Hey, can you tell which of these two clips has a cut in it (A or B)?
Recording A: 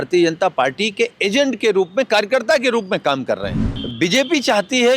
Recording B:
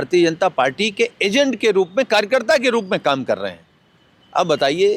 A